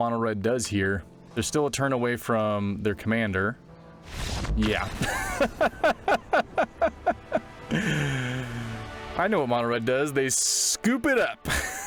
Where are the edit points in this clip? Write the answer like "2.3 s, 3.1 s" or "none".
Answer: none